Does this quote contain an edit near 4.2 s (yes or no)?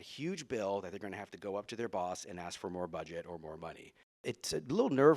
yes